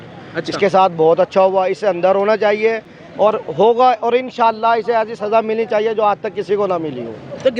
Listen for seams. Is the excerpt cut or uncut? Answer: uncut